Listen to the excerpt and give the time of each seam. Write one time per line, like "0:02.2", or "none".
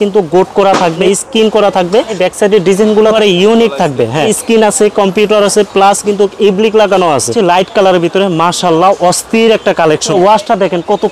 0:01.0
0:02.1
0:03.1
0:04.4
0:07.3
0:10.1